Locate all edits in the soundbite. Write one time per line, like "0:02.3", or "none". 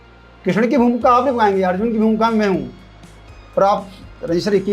none